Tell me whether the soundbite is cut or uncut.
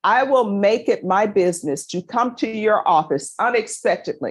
uncut